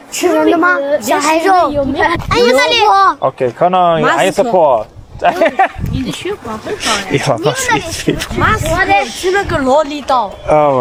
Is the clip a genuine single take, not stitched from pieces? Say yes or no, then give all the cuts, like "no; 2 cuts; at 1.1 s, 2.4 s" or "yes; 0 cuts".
yes; 0 cuts